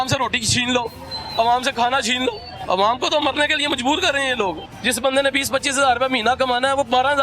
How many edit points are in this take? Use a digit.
2